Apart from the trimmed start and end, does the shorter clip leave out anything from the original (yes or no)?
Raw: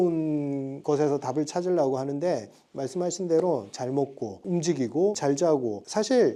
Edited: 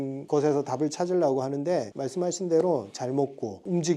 yes